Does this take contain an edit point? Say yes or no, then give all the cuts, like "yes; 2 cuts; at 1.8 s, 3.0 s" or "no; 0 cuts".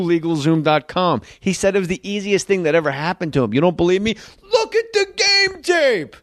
no; 0 cuts